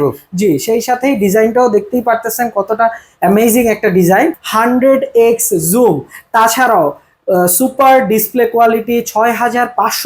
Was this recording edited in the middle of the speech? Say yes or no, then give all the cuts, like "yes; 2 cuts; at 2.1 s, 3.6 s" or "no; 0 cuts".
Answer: yes; 1 cut; at 4.4 s